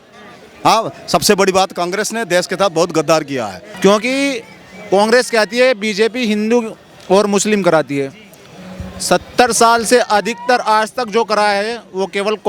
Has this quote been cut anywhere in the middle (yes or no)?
yes